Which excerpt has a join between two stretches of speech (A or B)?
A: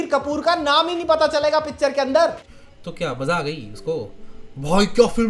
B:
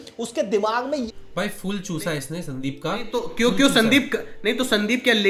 A